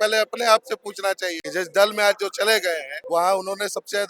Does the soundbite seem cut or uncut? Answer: cut